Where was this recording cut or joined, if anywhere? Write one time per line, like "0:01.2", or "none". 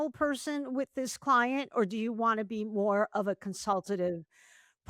none